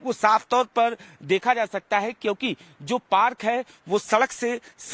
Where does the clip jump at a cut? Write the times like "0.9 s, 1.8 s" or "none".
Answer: 2.4 s